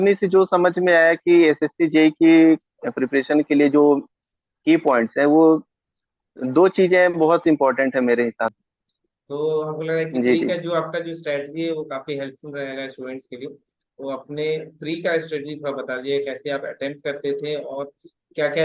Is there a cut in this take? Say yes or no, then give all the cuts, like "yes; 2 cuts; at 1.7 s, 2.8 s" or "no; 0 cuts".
yes; 1 cut; at 8.6 s